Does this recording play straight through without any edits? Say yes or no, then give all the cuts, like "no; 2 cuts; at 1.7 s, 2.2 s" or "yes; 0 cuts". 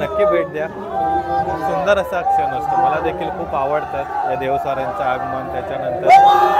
yes; 0 cuts